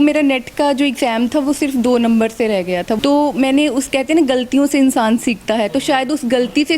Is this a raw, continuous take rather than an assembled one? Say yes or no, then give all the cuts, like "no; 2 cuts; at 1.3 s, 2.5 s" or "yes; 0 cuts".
no; 1 cut; at 3.0 s